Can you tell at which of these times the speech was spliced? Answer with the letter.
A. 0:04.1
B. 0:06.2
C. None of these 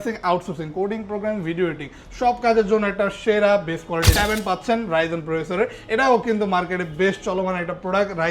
A